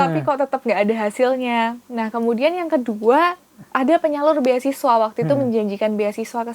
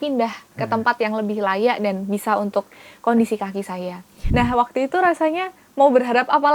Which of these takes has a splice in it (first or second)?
second